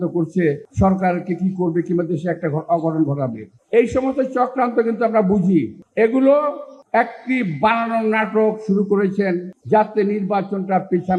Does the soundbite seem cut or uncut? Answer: uncut